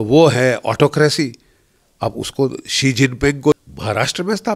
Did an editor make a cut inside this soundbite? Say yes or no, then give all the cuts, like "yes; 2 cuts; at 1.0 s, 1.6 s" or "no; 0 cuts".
yes; 1 cut; at 3.5 s